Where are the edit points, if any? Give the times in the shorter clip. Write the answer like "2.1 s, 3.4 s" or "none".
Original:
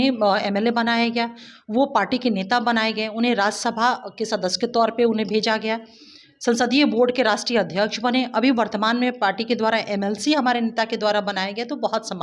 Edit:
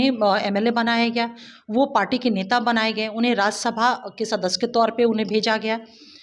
none

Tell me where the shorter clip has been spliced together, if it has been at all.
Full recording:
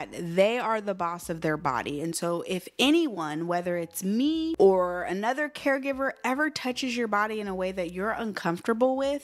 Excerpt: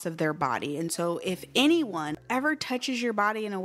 2.2 s

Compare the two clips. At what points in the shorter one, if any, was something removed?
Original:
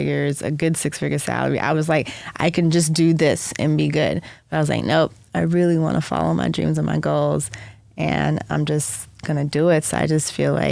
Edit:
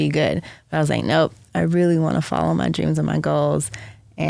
none

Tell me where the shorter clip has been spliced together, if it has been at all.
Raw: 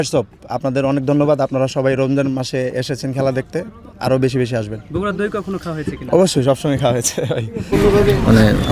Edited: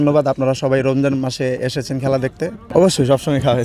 2.6 s

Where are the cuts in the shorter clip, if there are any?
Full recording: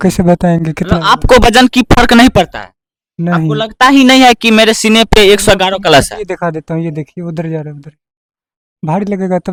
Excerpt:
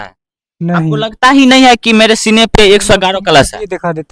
none

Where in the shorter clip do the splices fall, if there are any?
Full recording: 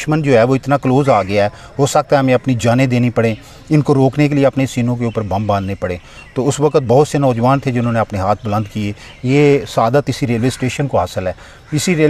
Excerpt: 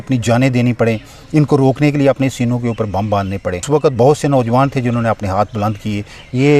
3.7 s

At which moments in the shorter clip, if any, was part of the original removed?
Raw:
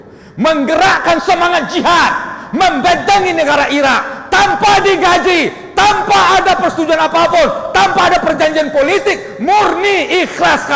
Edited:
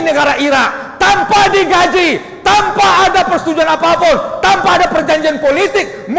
none

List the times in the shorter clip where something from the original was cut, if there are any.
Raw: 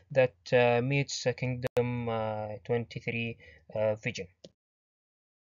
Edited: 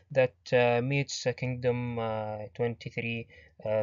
1.6 s

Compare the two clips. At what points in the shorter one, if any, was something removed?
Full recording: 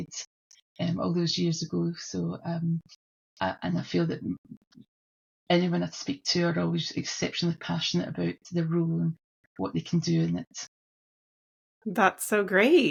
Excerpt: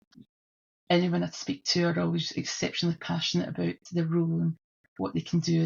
none

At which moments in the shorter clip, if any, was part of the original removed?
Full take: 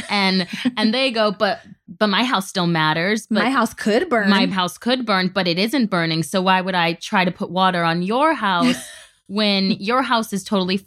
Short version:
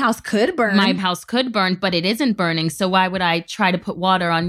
none

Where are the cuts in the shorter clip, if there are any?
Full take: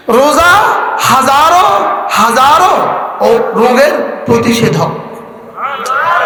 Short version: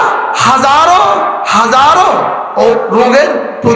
none

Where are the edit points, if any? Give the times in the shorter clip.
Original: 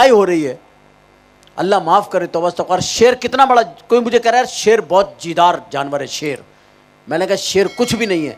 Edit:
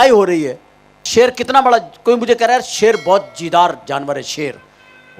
1.0 s

